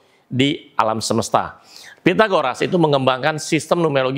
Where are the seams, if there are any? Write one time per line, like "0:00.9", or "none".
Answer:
none